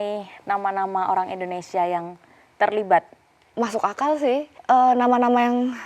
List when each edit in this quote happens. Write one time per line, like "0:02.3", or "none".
0:03.4
0:04.6